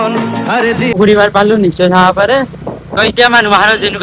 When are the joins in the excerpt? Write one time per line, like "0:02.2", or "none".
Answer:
0:01.0